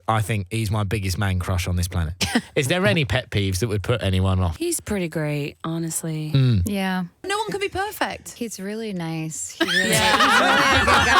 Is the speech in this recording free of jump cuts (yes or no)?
no